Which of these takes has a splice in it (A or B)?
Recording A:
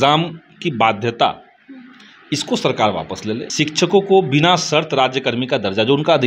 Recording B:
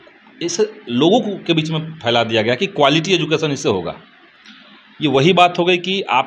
A